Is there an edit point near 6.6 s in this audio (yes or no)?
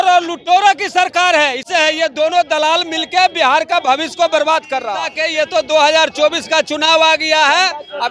no